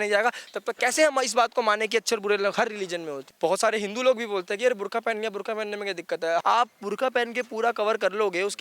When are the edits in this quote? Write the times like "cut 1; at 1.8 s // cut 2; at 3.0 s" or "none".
cut 1; at 3.3 s // cut 2; at 6.4 s